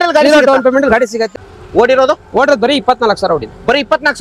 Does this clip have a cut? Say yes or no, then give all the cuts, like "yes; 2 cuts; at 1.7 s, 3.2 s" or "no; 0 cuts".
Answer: yes; 1 cut; at 1.2 s